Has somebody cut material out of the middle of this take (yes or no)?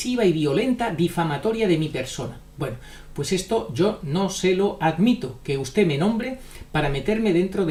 no